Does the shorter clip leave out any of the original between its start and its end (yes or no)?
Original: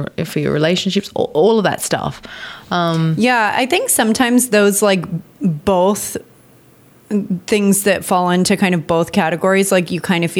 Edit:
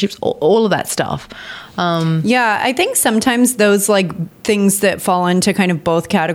yes